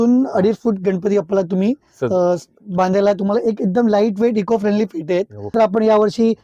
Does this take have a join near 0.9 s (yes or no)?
no